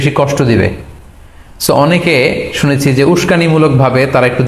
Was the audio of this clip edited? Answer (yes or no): no